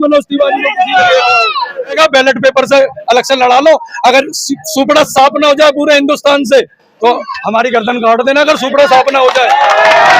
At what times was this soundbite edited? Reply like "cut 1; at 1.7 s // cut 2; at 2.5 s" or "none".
cut 1; at 2.0 s

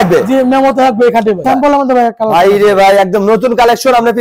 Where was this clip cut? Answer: cut 1; at 1.4 s

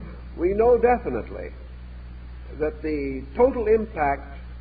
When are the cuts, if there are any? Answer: none

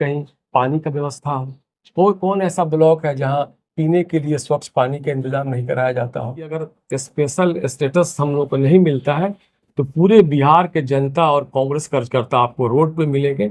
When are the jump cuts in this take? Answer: cut 1; at 6.7 s

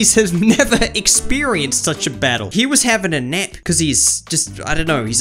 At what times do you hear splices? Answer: cut 1; at 2.5 s // cut 2; at 3.5 s

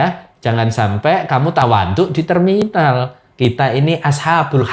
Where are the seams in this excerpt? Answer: cut 1; at 3.2 s

